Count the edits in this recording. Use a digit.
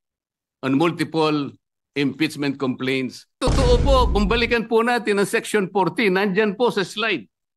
1